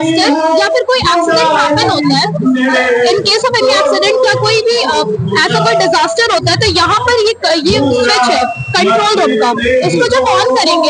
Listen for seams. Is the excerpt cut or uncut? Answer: uncut